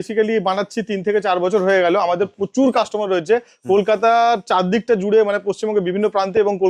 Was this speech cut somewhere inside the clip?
no; 0 cuts

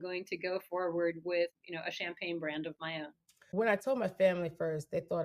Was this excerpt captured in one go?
no; 2 cuts; at 1.5 s, 3.4 s

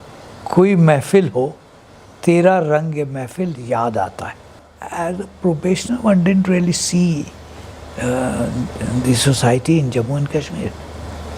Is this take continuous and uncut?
no; 1 cut; at 4.7 s

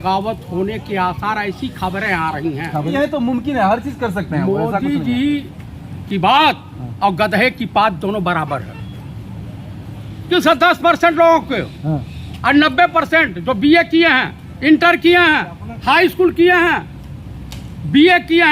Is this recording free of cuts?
no; 2 cuts; at 2.9 s, 10.2 s

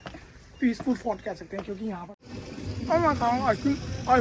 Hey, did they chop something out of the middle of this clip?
yes; 1 cut; at 2.2 s

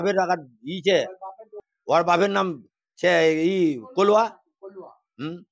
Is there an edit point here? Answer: yes; 1 cut; at 1.6 s

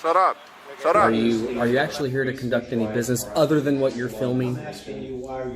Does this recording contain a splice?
yes; 1 cut; at 1.1 s

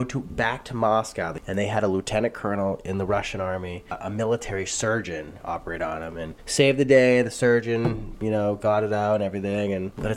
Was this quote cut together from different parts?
yes; 2 cuts; at 1.4 s, 3.9 s

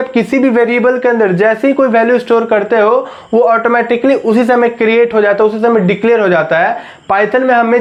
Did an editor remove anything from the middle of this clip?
no; 0 cuts

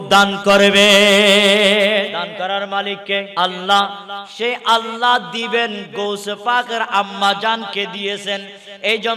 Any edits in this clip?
yes; 2 cuts; at 2.1 s, 3.3 s

